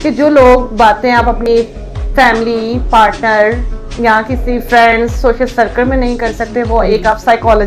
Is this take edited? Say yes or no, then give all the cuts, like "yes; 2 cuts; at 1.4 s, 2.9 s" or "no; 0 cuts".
no; 0 cuts